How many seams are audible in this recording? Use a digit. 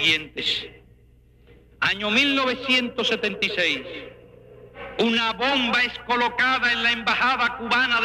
1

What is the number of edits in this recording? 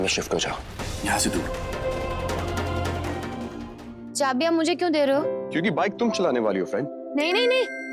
1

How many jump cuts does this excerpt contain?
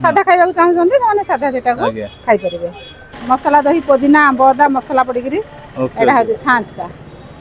1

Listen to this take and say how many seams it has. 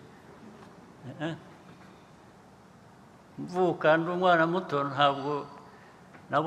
0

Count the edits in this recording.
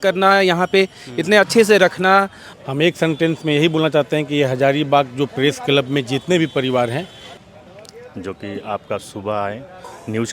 2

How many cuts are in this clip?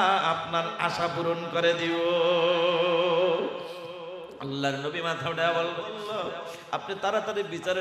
1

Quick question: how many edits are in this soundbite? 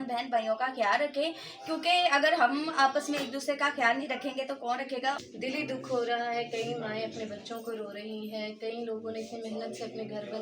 1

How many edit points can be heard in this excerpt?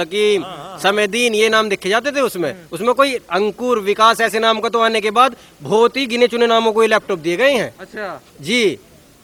0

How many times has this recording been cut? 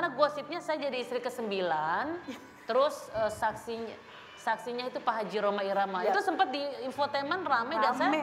0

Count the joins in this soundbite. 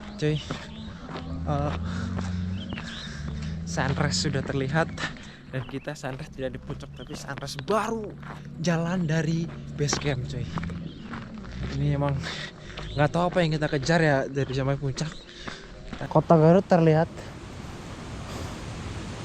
1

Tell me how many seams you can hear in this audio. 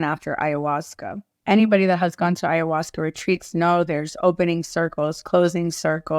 1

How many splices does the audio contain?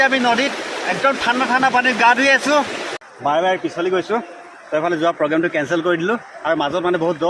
1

